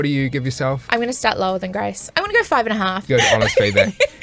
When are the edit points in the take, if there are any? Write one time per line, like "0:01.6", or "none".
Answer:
0:00.8
0:02.0
0:03.0